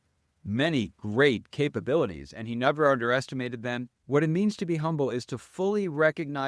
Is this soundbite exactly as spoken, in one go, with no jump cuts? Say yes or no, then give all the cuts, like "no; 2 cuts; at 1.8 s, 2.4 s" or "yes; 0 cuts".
no; 1 cut; at 3.9 s